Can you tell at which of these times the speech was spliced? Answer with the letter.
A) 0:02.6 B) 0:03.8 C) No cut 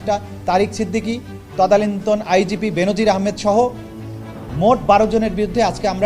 B